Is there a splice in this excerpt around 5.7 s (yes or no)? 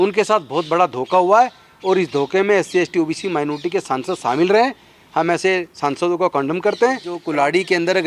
no